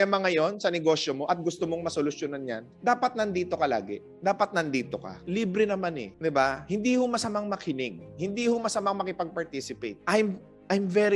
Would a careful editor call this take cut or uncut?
uncut